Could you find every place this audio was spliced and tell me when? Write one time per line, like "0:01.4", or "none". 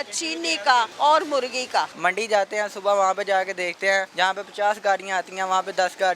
0:00.9
0:01.9
0:04.1